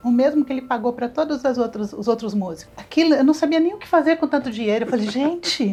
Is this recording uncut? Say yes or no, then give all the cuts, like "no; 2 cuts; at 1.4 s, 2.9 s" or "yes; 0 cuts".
yes; 0 cuts